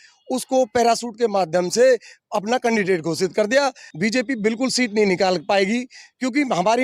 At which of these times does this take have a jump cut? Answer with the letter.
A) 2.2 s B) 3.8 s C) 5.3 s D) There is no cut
B